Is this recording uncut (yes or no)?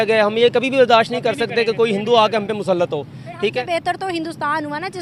yes